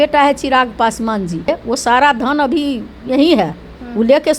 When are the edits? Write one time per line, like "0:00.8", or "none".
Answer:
0:01.5